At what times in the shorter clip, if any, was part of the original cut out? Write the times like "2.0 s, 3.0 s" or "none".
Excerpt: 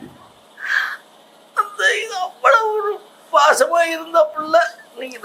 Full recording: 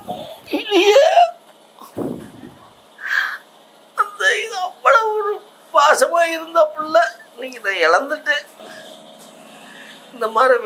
none